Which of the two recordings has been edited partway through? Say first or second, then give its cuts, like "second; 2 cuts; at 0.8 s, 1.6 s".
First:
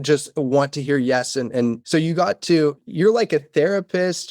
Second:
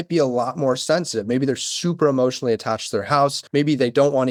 first; 1 cut; at 2.8 s